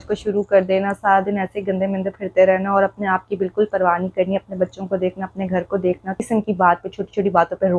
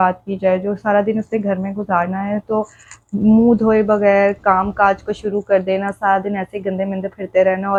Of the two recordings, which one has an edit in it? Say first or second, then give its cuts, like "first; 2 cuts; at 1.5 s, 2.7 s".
first; 1 cut; at 6.2 s